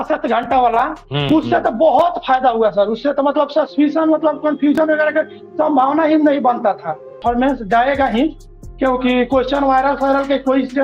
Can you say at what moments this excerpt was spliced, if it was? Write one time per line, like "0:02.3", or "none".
0:07.2

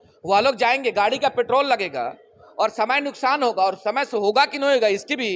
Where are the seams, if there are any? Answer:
none

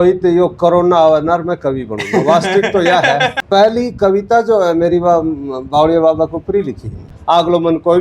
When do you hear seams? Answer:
0:03.4
0:07.1

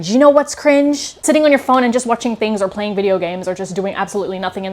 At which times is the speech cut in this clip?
0:01.1

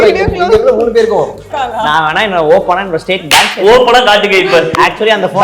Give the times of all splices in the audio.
0:01.5

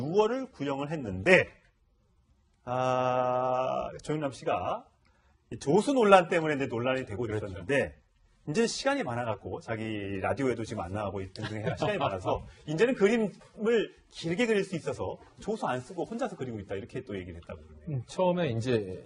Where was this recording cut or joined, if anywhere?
none

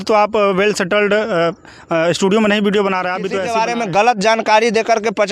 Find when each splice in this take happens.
0:03.4

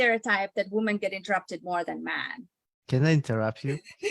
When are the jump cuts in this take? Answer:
0:02.8

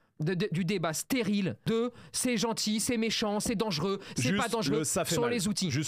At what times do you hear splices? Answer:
0:01.6

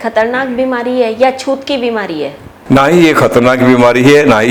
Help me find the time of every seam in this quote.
none

